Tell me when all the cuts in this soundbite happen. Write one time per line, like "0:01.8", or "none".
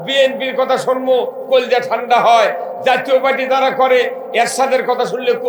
none